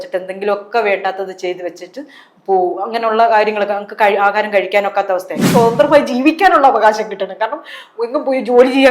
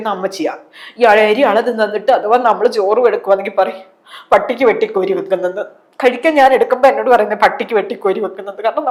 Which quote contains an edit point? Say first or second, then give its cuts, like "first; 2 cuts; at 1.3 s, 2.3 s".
first; 1 cut; at 5.4 s